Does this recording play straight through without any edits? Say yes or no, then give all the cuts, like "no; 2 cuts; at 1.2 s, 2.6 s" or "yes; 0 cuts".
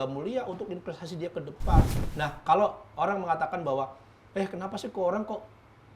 no; 1 cut; at 2.0 s